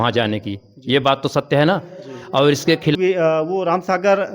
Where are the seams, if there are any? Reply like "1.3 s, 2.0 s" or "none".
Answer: 2.9 s